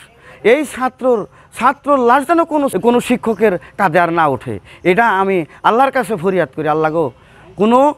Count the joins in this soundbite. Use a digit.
1